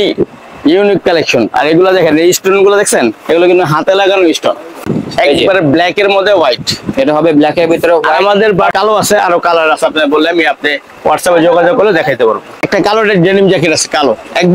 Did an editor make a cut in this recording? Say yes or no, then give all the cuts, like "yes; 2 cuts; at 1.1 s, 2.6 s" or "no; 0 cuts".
yes; 3 cuts; at 5.0 s, 8.7 s, 12.6 s